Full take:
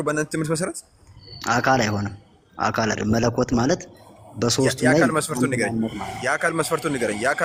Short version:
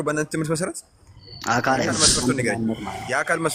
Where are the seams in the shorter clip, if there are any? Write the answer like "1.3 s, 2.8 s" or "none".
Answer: 2.0 s